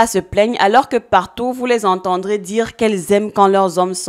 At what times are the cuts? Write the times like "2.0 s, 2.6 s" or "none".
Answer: none